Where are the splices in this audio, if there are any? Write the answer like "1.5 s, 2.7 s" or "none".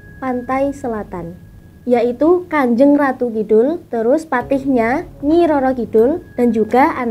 none